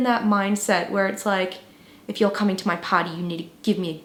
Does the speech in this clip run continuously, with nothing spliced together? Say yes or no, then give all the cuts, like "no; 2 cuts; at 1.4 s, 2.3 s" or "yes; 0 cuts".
yes; 0 cuts